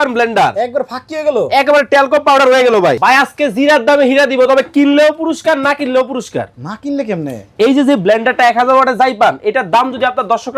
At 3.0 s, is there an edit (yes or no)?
yes